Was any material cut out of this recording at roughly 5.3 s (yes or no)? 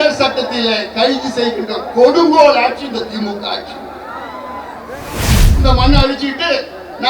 yes